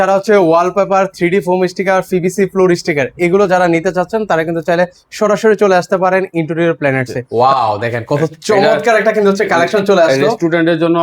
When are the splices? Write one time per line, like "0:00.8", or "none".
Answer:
0:07.1